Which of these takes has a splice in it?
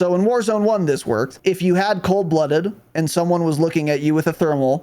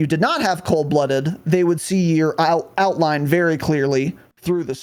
first; 1 cut; at 1.3 s

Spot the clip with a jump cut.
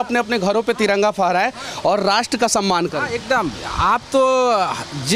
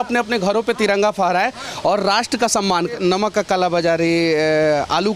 second; 1 cut; at 3.0 s

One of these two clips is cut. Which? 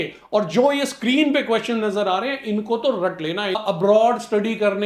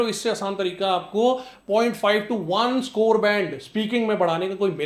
first; 1 cut; at 3.6 s

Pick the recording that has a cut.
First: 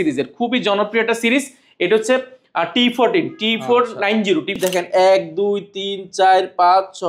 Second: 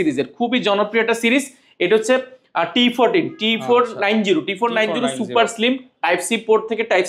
first; 1 cut; at 4.6 s

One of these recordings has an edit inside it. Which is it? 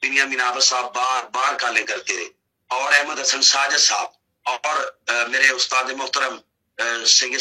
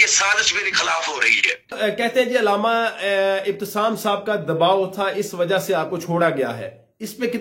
second; 1 cut; at 1.8 s

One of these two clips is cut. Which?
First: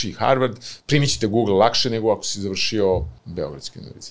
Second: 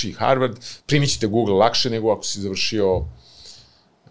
first; 1 cut; at 3.2 s

